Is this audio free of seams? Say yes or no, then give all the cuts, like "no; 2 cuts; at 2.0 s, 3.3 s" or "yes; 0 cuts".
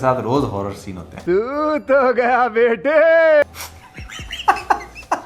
yes; 0 cuts